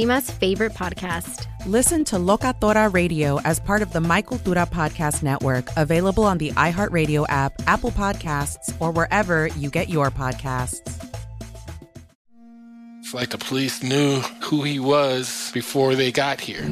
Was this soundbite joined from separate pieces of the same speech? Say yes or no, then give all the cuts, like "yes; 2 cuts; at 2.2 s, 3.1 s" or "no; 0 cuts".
yes; 1 cut; at 12.1 s